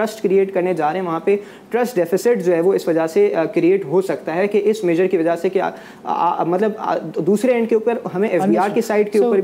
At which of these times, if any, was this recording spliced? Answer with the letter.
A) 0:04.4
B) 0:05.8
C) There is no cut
C